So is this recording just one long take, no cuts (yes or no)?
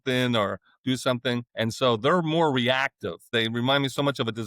no